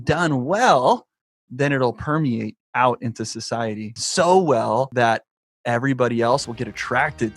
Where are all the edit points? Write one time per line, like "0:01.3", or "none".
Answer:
0:02.7
0:03.9
0:04.9
0:06.4